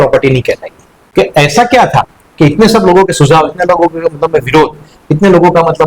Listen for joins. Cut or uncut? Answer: cut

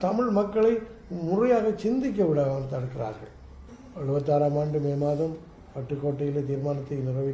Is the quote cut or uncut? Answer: uncut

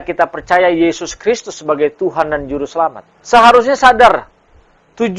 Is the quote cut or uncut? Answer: cut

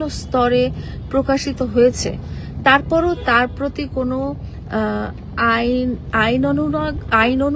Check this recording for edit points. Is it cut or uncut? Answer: uncut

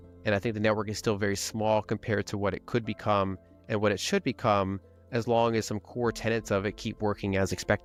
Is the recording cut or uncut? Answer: uncut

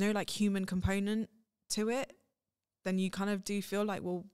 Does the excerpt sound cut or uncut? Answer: uncut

